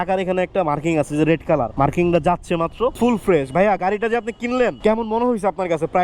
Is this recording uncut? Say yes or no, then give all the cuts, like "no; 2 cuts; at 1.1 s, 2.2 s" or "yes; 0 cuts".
no; 3 cuts; at 1.7 s, 3.0 s, 4.8 s